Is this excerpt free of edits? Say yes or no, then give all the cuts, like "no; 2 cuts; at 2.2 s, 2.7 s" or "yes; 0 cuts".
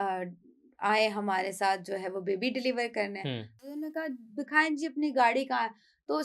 no; 1 cut; at 3.6 s